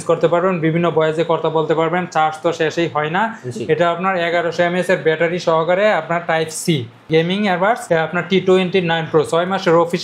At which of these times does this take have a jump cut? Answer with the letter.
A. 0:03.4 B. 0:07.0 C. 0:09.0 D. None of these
B